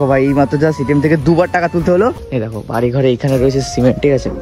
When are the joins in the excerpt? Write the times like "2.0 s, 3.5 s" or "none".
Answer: 2.2 s